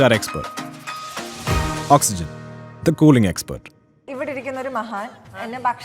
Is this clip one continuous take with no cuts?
no; 1 cut; at 4.0 s

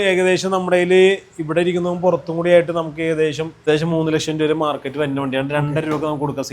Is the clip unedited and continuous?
no; 1 cut; at 3.5 s

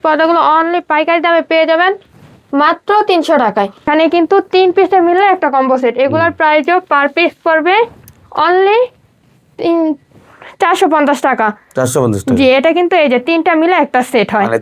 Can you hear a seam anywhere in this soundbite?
yes; 1 cut; at 3.9 s

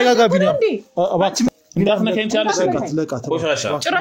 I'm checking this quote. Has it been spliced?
yes; 1 cut; at 1.5 s

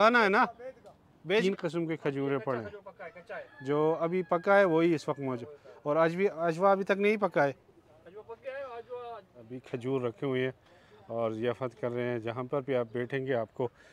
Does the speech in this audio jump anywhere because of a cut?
yes; 2 cuts; at 1.4 s, 9.6 s

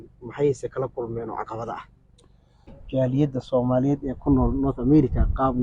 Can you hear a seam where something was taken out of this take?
yes; 1 cut; at 2.8 s

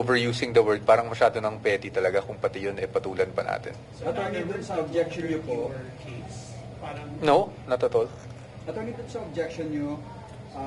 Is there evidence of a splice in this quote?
no; 0 cuts

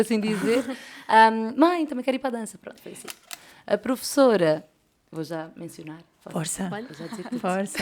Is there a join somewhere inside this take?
yes; 1 cut; at 3.3 s

